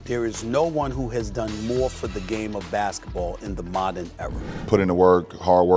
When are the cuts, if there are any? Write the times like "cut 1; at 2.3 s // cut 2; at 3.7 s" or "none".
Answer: cut 1; at 4.5 s